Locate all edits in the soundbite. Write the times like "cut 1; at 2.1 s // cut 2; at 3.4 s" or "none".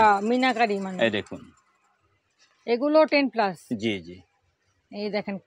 none